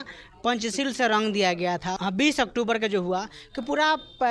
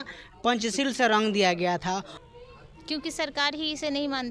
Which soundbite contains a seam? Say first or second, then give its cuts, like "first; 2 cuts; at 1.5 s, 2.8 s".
second; 1 cut; at 2.0 s